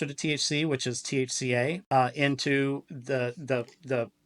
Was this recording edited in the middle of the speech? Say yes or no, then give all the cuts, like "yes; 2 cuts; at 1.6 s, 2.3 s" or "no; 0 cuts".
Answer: yes; 1 cut; at 1.8 s